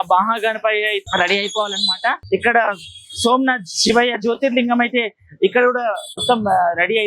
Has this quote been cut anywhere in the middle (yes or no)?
yes